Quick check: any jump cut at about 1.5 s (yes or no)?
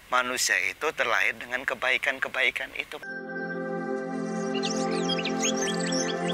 no